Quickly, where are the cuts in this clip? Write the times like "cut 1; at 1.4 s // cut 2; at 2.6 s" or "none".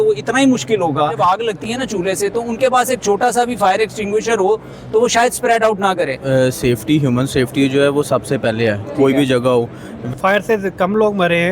cut 1; at 1.2 s // cut 2; at 6.2 s // cut 3; at 9.9 s